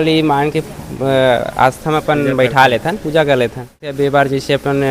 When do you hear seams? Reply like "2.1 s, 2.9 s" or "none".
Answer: 3.8 s